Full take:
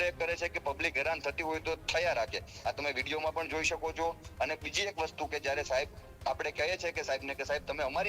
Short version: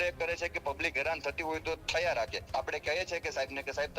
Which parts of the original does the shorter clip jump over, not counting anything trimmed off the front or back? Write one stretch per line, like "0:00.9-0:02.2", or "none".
0:02.4-0:06.1

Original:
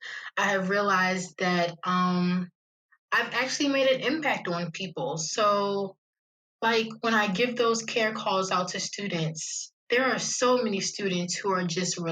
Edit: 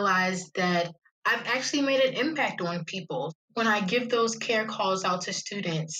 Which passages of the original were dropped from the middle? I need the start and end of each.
0:01.8-0:02.8
0:05.3-0:06.9

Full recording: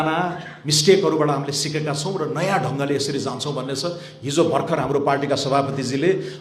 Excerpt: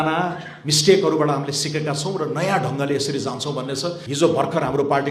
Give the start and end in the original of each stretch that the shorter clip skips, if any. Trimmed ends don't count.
0:04.0-0:04.2

